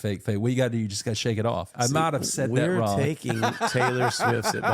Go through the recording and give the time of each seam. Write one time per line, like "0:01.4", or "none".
0:01.7

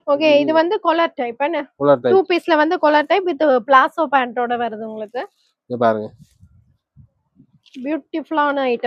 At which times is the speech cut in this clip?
none

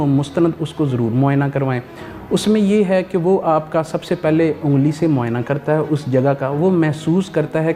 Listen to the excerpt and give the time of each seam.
none

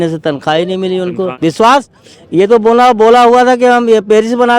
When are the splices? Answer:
0:01.3

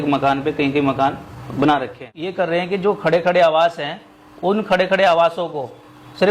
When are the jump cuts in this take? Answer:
0:02.3

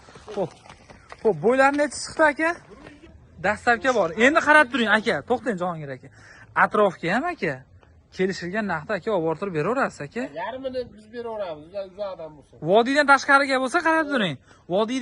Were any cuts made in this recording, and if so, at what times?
0:03.2

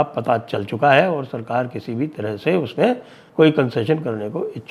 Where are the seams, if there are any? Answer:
0:03.2

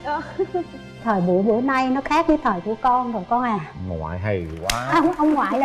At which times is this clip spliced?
none

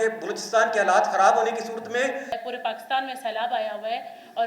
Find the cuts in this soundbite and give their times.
0:02.4

